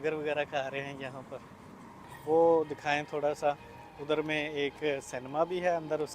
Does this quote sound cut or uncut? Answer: cut